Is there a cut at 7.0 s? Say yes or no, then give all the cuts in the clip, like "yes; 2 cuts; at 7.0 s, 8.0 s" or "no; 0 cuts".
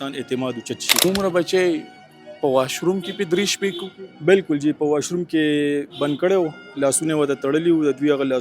no; 1 cut; at 1.0 s